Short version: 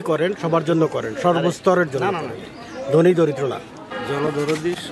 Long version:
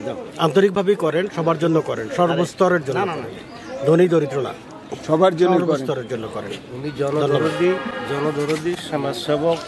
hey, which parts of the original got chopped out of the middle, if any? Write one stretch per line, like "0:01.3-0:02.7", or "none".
0:04.9-0:07.9